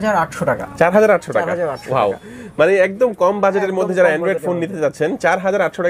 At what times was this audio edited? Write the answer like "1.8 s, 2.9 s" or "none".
none